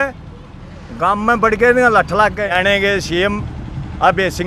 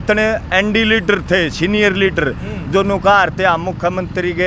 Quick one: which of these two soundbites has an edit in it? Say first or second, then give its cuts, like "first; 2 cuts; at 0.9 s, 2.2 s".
first; 1 cut; at 2.5 s